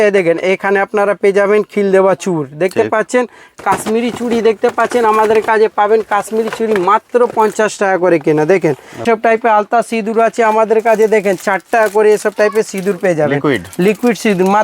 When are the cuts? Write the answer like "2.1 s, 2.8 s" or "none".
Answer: 9.0 s